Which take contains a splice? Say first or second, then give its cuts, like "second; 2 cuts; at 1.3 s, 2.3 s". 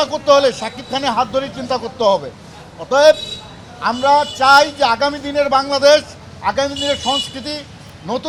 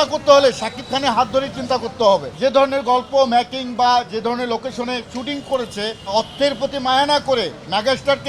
second; 2 cuts; at 2.3 s, 6.0 s